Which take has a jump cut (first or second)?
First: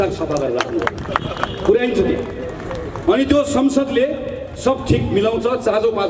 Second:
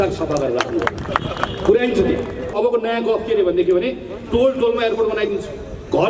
second